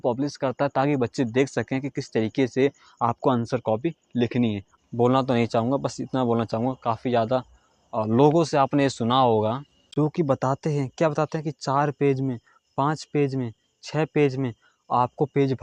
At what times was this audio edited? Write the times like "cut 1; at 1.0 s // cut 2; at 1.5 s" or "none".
cut 1; at 4.7 s

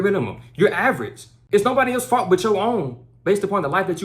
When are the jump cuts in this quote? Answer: cut 1; at 1.3 s

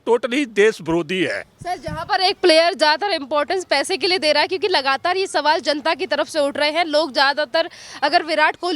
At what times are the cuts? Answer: none

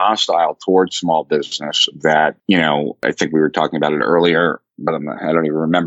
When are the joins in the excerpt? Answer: cut 1; at 3.0 s

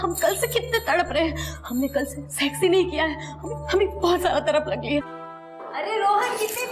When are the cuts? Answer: cut 1; at 5.2 s

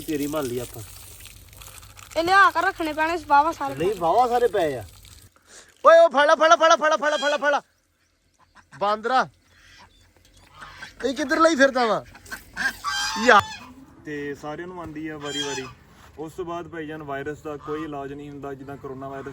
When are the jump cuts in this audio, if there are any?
cut 1; at 5.2 s // cut 2; at 13.4 s

